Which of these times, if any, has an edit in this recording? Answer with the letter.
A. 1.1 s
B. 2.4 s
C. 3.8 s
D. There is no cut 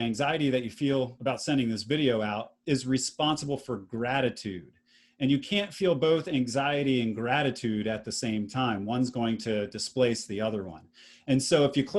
A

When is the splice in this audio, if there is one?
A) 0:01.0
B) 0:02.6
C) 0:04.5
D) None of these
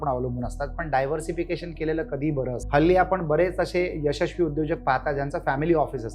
B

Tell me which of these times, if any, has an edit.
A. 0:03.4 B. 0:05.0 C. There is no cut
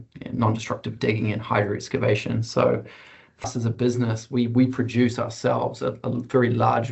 A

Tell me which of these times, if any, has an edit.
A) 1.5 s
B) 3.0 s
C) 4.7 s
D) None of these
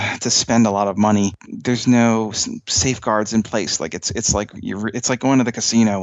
A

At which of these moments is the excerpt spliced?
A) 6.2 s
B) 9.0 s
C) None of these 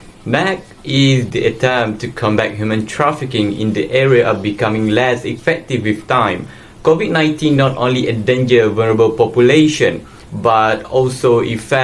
A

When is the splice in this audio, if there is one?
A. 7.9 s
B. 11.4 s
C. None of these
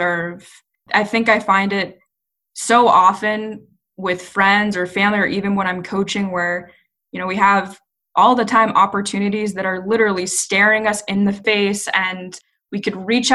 B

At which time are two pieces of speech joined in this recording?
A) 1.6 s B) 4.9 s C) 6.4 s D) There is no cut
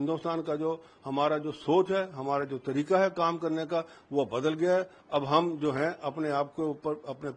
D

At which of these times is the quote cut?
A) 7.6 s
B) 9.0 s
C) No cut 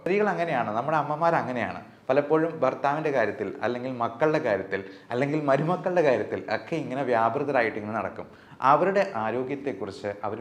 C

